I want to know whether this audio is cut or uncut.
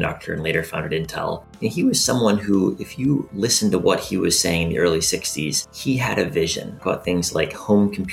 cut